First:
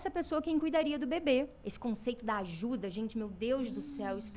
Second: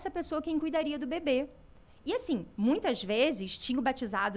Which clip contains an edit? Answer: first; 1 cut; at 1.6 s

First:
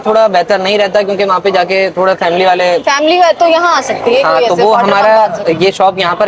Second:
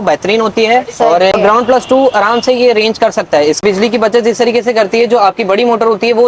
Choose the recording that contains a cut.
second; 2 cuts; at 1.3 s, 3.6 s

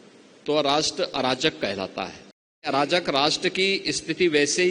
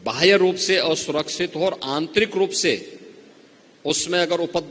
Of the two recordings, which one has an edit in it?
first; 1 cut; at 2.7 s

